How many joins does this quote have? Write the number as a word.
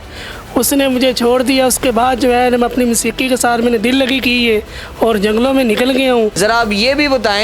one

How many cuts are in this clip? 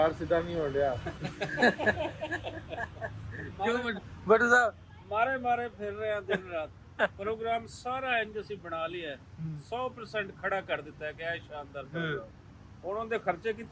zero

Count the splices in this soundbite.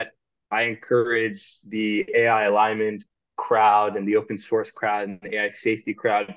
zero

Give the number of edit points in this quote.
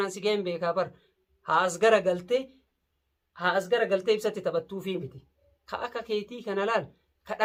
zero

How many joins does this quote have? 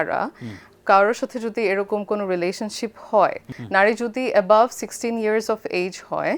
one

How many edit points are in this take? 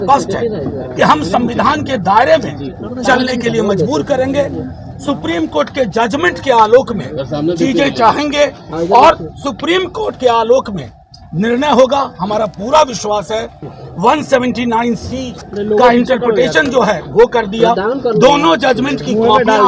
one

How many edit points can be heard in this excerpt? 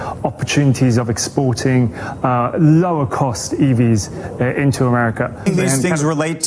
one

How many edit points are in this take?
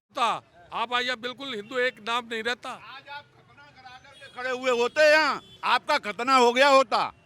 one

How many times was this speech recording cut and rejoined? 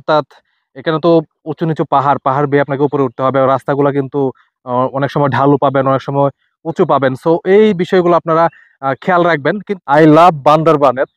one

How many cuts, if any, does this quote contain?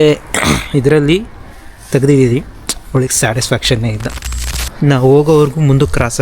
one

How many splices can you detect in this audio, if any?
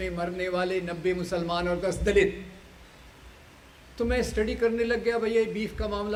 zero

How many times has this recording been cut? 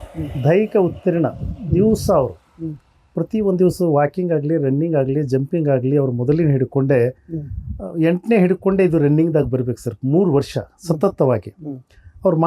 zero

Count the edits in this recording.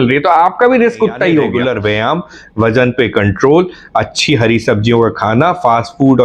one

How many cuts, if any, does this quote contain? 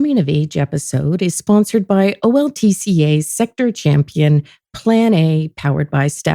zero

